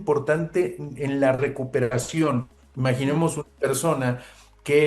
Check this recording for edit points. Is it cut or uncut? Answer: cut